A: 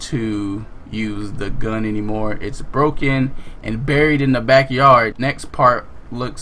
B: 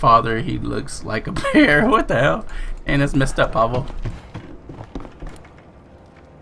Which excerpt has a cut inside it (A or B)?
A